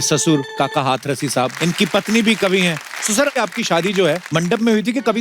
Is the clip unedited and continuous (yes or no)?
no